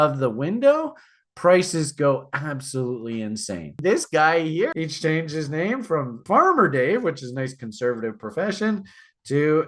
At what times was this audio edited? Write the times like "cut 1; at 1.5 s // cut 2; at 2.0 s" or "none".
cut 1; at 3.8 s // cut 2; at 4.7 s // cut 3; at 6.2 s